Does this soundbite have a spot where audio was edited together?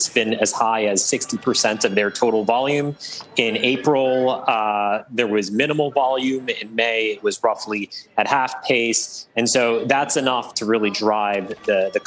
no; 0 cuts

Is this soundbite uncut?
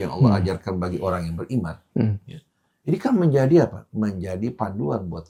yes; 0 cuts

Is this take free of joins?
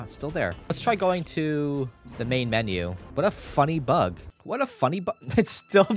no; 4 cuts; at 0.7 s, 2.0 s, 3.0 s, 4.3 s

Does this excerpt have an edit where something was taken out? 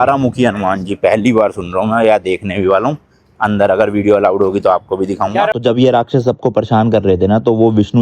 yes; 1 cut; at 5.6 s

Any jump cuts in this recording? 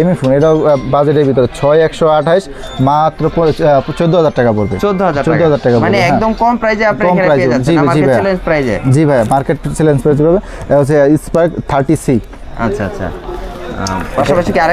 no; 0 cuts

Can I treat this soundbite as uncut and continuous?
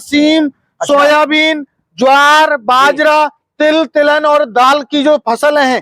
yes; 0 cuts

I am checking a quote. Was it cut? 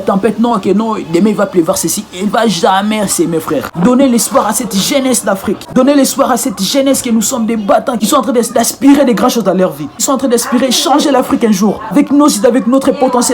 yes; 3 cuts; at 3.7 s, 8.0 s, 11.9 s

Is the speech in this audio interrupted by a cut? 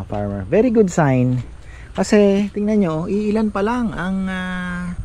no; 0 cuts

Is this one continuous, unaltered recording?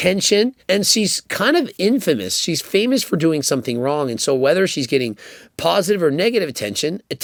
yes; 0 cuts

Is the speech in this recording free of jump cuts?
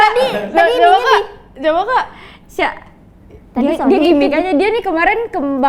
yes; 0 cuts

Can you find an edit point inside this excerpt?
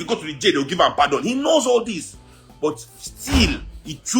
no; 0 cuts

